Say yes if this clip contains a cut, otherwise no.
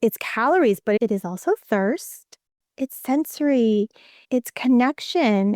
yes